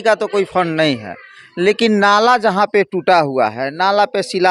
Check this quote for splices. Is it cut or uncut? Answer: uncut